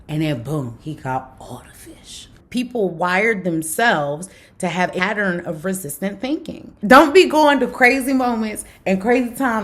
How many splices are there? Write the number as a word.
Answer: three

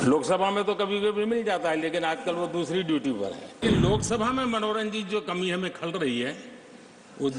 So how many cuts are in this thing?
one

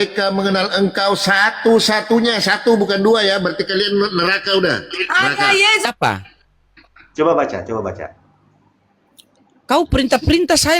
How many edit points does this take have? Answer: one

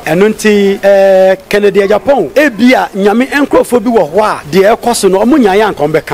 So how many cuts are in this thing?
three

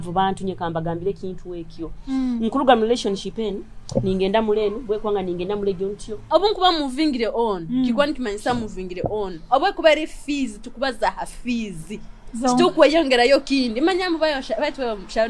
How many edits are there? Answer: one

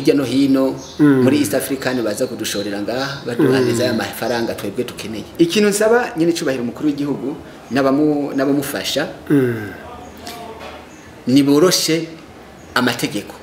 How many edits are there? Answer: one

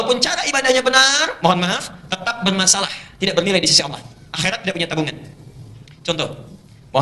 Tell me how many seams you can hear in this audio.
zero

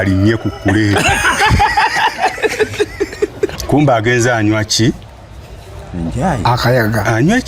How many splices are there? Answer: one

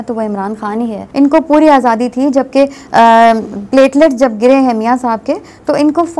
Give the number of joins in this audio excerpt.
one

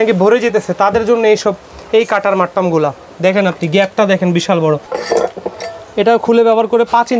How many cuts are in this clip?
one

